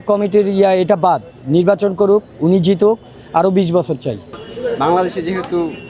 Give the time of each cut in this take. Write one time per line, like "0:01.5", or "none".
0:04.3